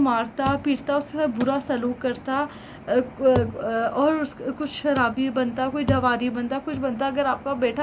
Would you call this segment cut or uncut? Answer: uncut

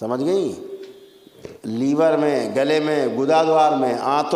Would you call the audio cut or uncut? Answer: uncut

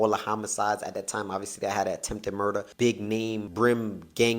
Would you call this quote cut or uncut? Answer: cut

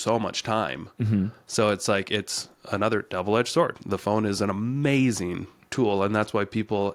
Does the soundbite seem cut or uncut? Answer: uncut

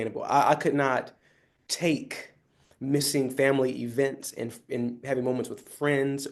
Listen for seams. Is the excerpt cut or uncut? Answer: uncut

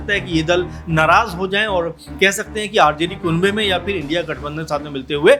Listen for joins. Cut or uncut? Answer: uncut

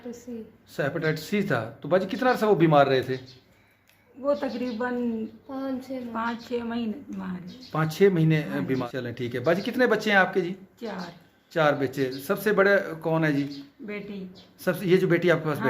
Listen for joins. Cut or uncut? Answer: cut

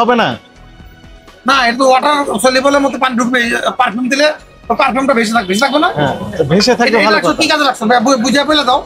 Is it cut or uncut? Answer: uncut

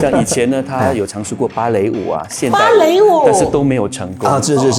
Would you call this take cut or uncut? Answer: uncut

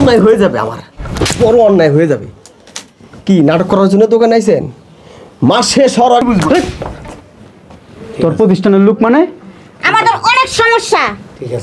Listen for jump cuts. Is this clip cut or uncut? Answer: cut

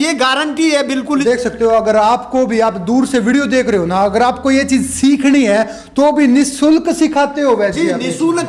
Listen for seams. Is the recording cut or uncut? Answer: cut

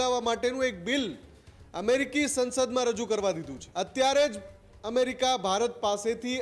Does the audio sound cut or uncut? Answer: cut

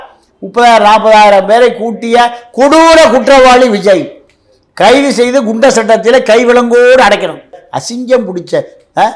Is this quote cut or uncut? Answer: cut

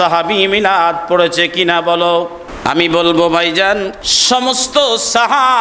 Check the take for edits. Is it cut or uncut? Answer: cut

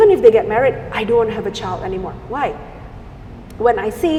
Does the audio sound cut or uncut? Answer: uncut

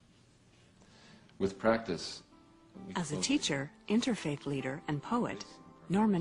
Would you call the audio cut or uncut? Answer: cut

